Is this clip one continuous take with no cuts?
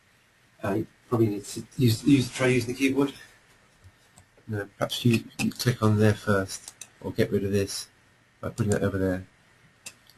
yes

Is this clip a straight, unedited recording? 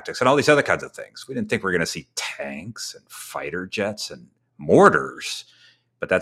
yes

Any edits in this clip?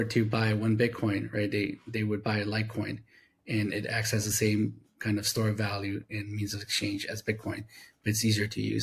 no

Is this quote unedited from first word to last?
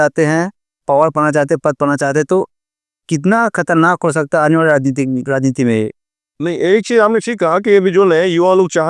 yes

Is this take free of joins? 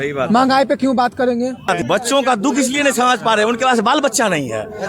no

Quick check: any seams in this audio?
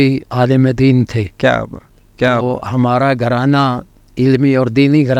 no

